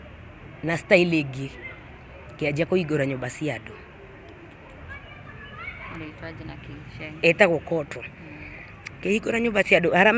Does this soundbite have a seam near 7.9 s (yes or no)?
no